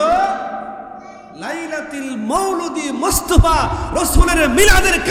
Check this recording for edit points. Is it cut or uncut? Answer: uncut